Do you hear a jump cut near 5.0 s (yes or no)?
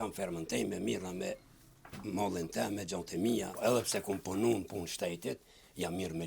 no